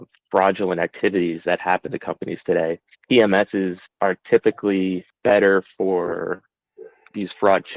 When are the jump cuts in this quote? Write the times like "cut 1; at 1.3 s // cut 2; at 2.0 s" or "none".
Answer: cut 1; at 2.9 s